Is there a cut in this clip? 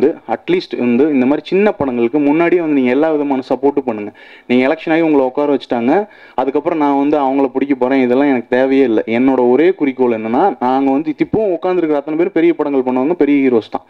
no; 0 cuts

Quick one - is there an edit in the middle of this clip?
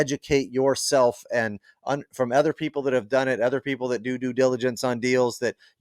no; 0 cuts

